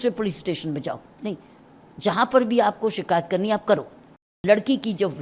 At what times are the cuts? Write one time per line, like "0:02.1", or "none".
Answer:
0:04.3